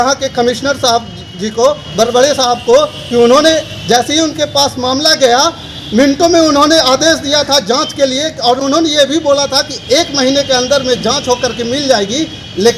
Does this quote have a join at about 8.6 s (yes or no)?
no